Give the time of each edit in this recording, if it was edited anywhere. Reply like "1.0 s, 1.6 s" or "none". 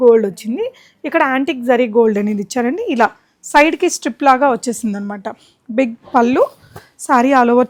none

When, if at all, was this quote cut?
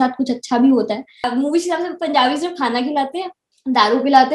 1.3 s

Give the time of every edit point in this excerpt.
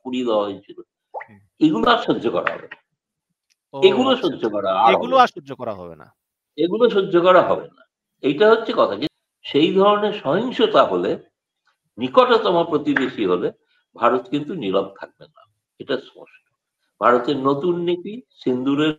9.1 s

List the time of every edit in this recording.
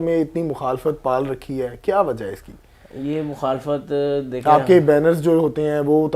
none

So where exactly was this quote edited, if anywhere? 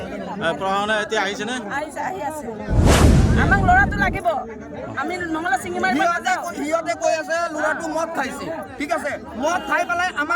2.7 s, 3.5 s

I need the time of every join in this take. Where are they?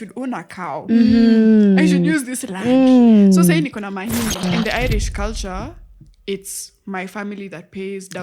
4.4 s

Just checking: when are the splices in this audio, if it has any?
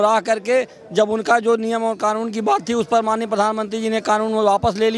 none

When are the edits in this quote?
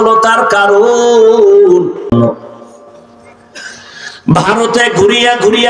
2.1 s

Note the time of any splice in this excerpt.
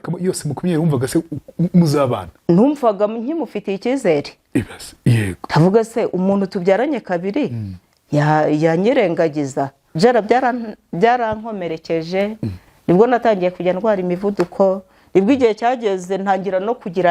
9.8 s

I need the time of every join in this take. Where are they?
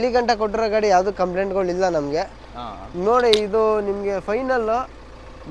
none

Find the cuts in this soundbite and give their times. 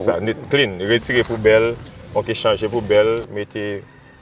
none

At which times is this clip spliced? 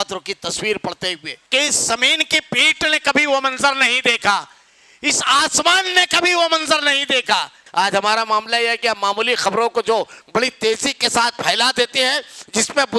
1.3 s, 7.6 s

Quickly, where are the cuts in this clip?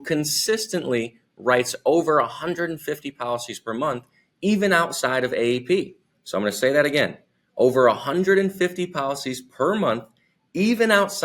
none

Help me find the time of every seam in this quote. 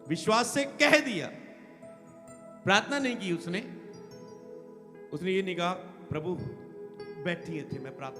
none

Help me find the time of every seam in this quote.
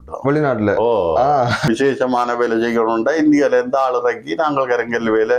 1.6 s

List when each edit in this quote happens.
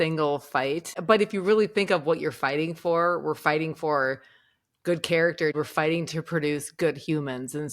0.9 s, 5.5 s

